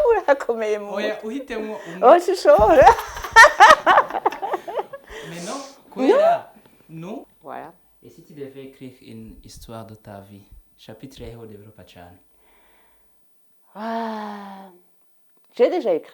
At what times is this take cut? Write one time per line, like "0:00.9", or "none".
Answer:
0:07.3